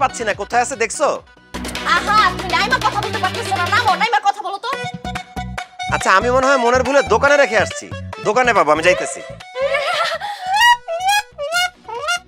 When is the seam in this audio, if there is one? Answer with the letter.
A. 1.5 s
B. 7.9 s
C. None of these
A